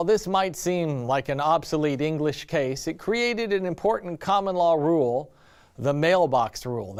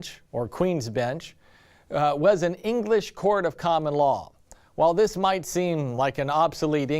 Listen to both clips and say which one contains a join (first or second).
second